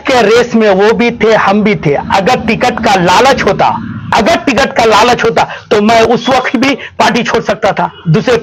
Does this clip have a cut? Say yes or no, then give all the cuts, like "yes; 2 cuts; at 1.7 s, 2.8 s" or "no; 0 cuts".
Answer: no; 0 cuts